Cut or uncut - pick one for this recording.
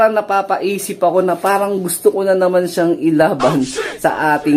uncut